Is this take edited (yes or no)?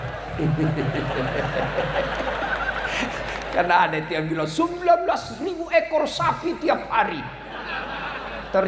no